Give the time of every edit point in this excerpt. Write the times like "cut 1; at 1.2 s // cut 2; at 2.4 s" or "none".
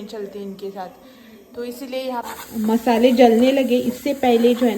cut 1; at 2.4 s